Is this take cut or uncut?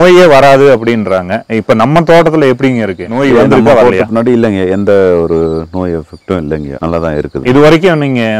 uncut